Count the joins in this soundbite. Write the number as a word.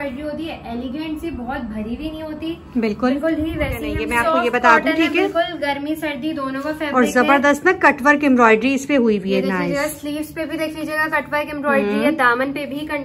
one